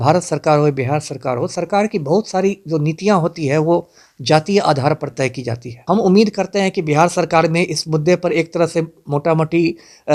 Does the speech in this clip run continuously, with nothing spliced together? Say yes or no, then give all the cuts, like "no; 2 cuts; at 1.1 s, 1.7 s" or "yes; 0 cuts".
no; 1 cut; at 5.8 s